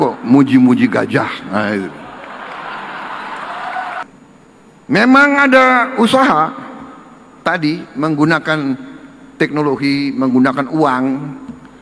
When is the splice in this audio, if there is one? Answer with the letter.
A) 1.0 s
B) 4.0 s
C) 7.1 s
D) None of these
B